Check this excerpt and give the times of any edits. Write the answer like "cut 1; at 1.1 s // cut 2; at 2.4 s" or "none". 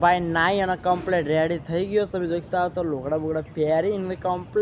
none